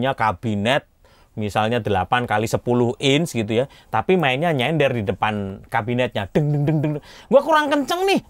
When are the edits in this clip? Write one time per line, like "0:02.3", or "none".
none